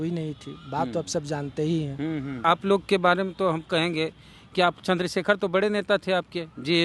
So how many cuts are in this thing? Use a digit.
1